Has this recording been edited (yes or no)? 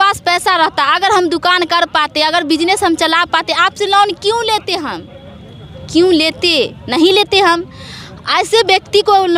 no